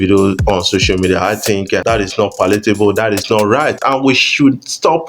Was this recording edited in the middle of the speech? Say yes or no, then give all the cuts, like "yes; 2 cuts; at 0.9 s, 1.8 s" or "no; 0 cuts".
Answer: yes; 2 cuts; at 1.8 s, 3.8 s